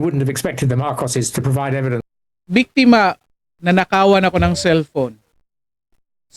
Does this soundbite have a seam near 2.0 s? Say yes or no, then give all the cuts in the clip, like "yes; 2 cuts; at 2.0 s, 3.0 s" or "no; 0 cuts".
yes; 1 cut; at 2.0 s